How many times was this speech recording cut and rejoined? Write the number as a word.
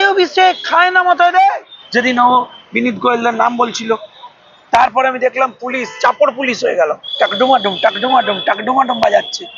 one